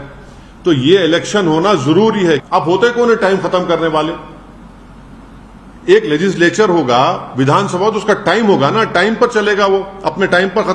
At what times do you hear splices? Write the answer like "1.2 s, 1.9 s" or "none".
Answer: 2.4 s